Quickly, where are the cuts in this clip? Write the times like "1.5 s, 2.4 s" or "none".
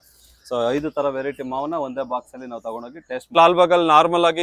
3.3 s

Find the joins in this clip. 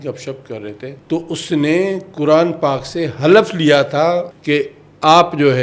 1.0 s, 4.3 s

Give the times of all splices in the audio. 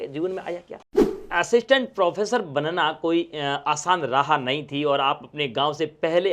1.0 s

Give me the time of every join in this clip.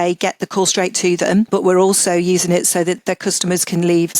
1.5 s, 3.0 s

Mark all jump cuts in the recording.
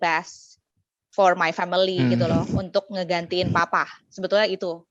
none

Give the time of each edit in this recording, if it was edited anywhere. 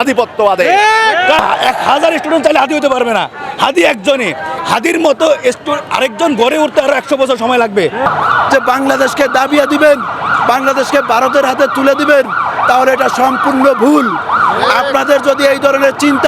1.4 s, 8.0 s

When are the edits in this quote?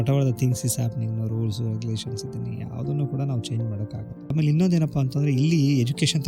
4.3 s

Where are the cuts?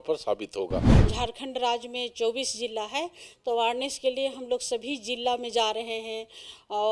1.0 s

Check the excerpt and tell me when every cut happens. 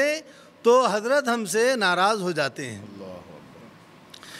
none

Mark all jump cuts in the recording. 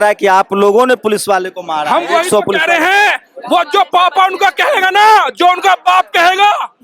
none

